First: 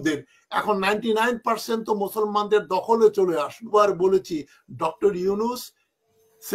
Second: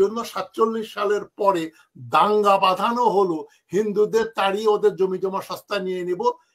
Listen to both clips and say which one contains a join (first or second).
first